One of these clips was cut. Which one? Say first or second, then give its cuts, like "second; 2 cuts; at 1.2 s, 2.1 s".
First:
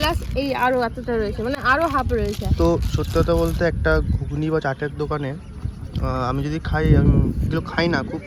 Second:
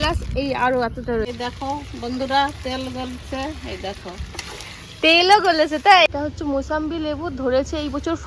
second; 2 cuts; at 1.3 s, 6.1 s